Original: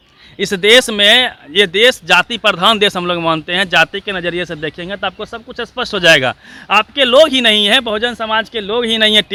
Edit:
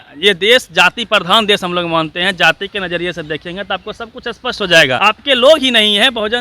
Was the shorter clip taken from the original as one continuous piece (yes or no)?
no